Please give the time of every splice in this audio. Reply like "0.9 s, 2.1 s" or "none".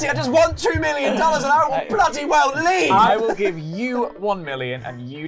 3.1 s

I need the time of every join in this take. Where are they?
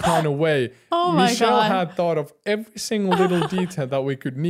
none

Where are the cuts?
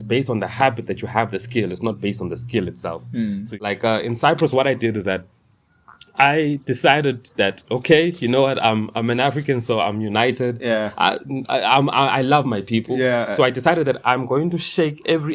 3.6 s

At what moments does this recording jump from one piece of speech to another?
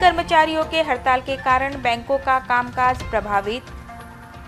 none

